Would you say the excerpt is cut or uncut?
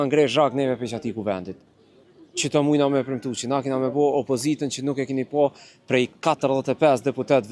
uncut